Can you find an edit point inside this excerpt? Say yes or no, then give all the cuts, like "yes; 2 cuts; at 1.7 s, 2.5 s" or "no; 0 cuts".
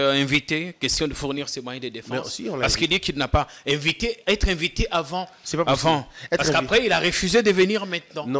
no; 0 cuts